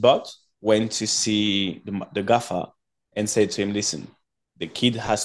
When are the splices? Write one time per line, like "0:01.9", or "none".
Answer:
none